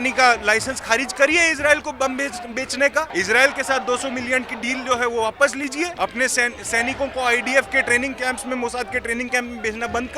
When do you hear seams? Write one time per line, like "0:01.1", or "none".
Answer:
0:03.1
0:05.9